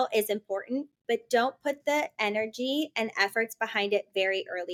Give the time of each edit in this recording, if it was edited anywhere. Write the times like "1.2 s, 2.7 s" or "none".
none